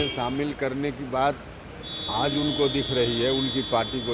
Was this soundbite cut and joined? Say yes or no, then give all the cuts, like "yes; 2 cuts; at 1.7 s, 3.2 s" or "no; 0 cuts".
no; 0 cuts